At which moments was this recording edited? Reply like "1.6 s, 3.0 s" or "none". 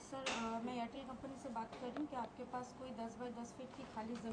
none